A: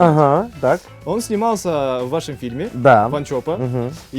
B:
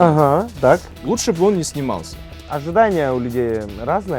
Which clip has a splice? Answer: B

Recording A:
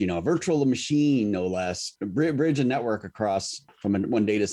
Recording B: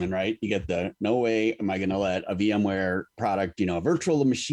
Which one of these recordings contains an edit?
A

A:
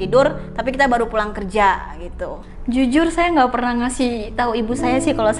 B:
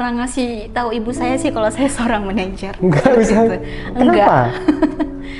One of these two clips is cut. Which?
A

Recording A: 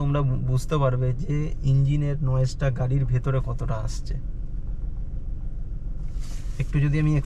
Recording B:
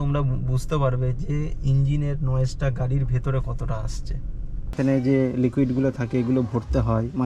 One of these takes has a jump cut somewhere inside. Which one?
B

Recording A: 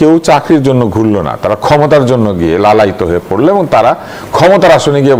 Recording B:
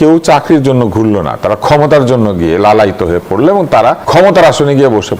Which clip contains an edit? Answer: B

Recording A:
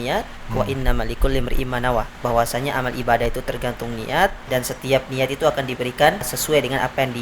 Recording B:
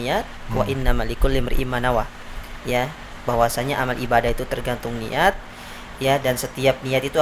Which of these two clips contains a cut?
A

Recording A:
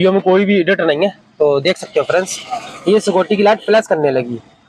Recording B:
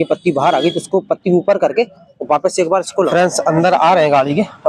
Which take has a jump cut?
B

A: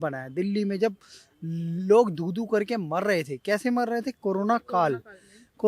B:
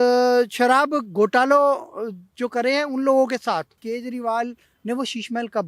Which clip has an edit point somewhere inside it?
B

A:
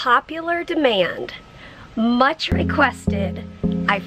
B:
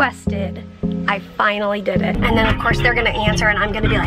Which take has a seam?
B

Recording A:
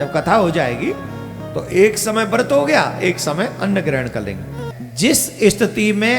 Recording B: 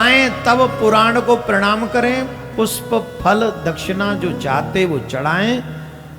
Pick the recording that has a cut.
A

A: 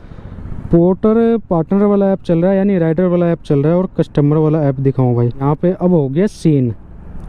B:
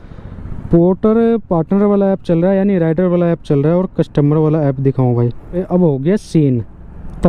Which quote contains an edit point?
B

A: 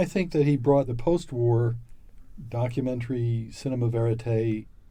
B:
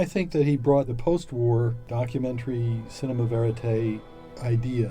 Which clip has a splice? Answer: B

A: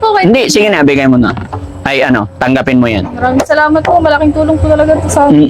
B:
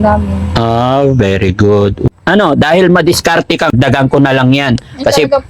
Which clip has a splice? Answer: B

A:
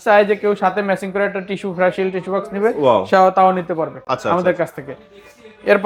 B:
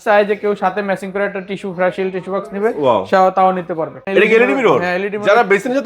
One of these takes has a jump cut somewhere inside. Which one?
B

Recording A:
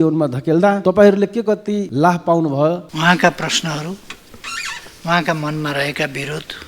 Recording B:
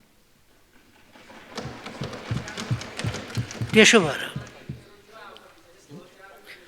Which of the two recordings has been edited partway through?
A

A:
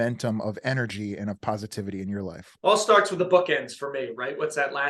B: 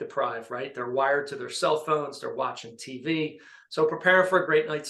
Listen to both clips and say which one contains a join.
A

